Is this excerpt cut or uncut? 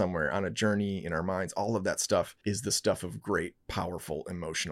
uncut